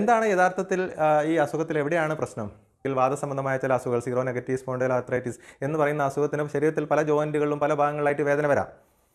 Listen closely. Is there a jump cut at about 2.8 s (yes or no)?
yes